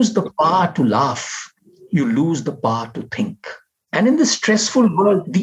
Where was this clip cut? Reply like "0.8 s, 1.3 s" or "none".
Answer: none